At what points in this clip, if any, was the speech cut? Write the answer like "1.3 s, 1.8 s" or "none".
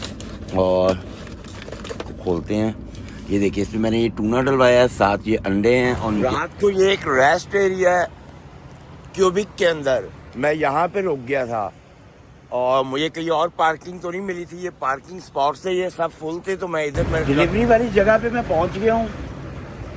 6.2 s, 17.2 s